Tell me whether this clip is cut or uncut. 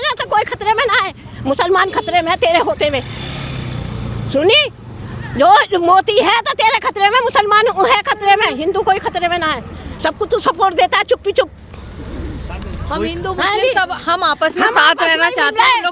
uncut